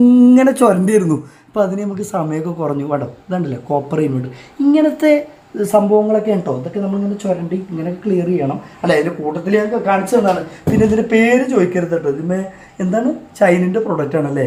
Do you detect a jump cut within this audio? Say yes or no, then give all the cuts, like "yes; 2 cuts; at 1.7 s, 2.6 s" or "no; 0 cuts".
no; 0 cuts